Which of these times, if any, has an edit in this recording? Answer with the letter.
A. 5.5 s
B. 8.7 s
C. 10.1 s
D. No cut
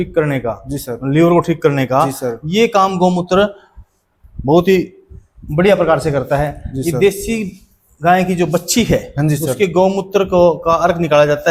D